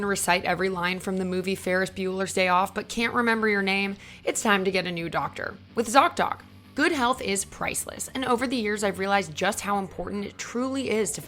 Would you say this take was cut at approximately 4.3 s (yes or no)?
no